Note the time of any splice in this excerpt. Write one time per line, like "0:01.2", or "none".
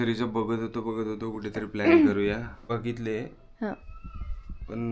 0:02.6